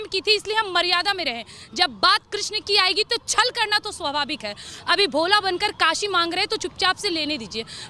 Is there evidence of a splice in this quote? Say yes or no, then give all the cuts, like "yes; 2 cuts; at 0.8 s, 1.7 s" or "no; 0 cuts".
no; 0 cuts